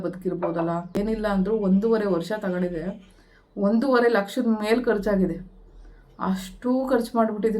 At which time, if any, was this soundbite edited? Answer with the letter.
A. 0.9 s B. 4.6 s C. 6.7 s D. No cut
A